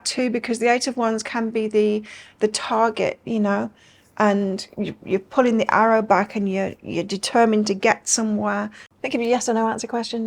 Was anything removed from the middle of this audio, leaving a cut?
yes; 1 cut; at 8.8 s

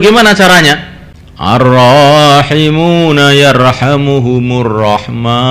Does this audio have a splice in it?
yes; 1 cut; at 1.6 s

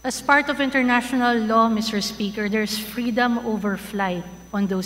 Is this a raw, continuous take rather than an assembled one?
yes; 0 cuts

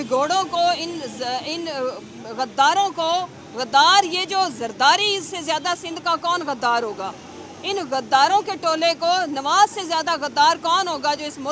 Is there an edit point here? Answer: no; 0 cuts

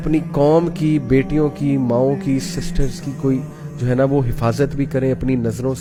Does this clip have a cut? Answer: no; 0 cuts

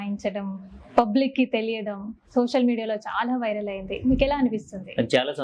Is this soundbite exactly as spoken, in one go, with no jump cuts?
yes; 0 cuts

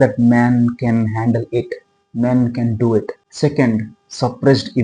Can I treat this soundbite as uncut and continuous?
no; 1 cut; at 3.2 s

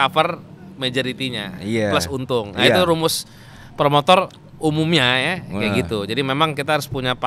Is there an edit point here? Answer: no; 0 cuts

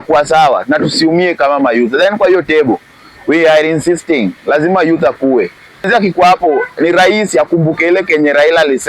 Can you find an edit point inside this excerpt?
yes; 1 cut; at 5.9 s

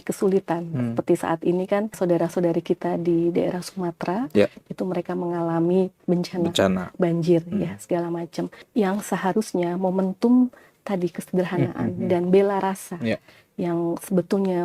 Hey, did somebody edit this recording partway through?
yes; 3 cuts; at 2.0 s, 6.0 s, 8.6 s

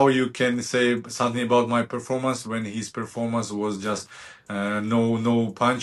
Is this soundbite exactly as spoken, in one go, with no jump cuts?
yes; 0 cuts

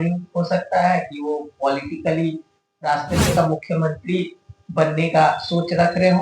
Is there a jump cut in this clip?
yes; 1 cut; at 3.3 s

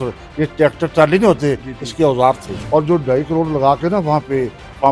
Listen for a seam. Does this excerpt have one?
yes; 1 cut; at 2.5 s

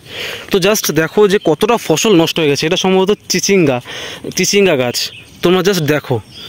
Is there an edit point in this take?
no; 0 cuts

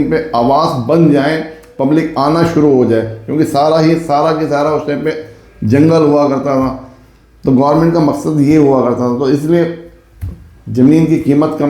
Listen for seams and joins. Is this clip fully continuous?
yes; 0 cuts

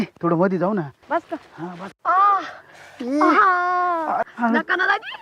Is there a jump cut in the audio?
yes; 1 cut; at 1.0 s

